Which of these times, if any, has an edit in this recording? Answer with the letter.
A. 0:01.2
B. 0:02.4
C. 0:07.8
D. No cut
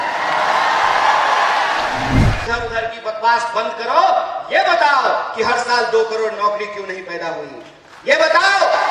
B